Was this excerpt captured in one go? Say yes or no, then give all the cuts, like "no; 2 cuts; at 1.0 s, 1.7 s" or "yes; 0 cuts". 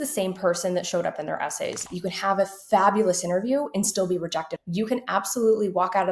no; 2 cuts; at 1.9 s, 4.6 s